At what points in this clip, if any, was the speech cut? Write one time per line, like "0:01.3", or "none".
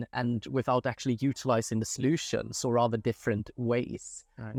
none